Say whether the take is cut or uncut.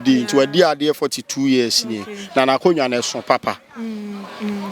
uncut